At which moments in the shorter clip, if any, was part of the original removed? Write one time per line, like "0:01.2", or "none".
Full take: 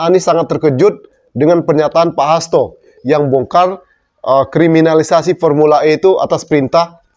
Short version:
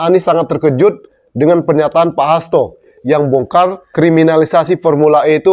0:03.9